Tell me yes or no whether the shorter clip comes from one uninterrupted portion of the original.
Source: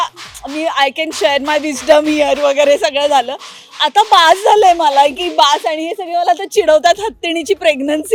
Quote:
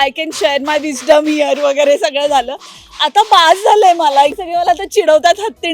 no